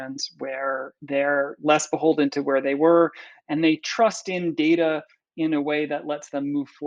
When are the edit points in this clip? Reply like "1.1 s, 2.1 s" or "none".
none